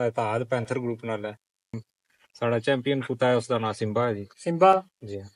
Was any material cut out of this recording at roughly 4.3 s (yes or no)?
no